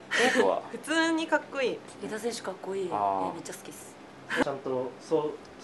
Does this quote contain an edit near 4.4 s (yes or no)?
yes